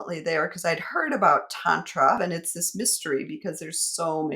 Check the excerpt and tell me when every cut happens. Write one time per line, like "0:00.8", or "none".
0:02.2